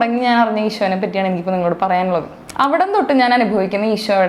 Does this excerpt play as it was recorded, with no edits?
no; 1 cut; at 2.4 s

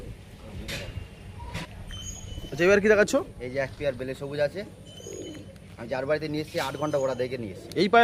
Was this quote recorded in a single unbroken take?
yes; 0 cuts

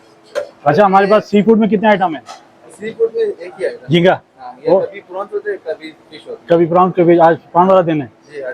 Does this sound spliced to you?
no; 0 cuts

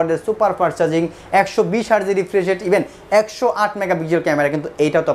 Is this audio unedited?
yes; 0 cuts

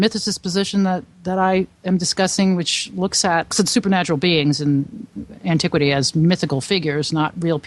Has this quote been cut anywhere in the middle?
yes; 1 cut; at 3.5 s

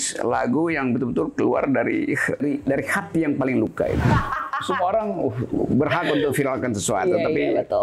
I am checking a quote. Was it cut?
yes; 2 cuts; at 2.4 s, 4.0 s

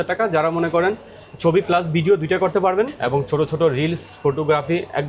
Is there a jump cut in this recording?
yes; 1 cut; at 3.0 s

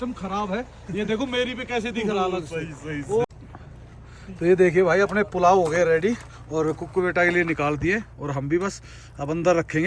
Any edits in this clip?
yes; 1 cut; at 3.3 s

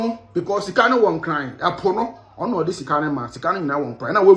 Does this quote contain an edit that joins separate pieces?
no; 0 cuts

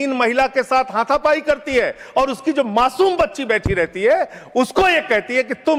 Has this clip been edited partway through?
no; 0 cuts

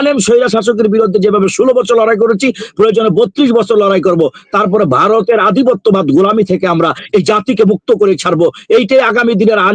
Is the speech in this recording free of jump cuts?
yes; 0 cuts

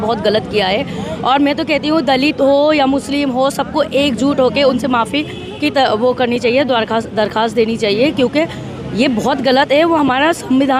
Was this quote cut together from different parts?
no; 0 cuts

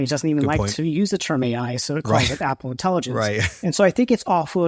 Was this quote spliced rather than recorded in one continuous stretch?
no; 0 cuts

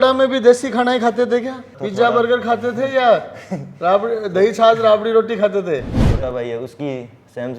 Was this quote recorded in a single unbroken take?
no; 2 cuts; at 1.8 s, 6.1 s

